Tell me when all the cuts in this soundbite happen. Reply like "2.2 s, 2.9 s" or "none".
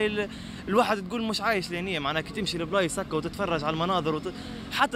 none